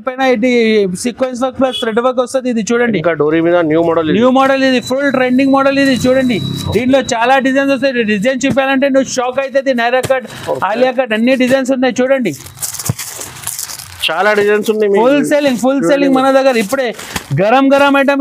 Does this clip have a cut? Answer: no; 0 cuts

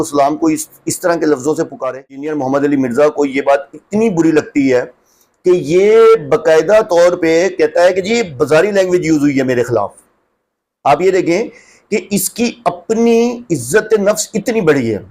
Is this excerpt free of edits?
no; 1 cut; at 2.3 s

